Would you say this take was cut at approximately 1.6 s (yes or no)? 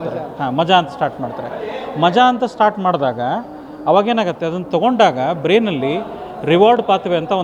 no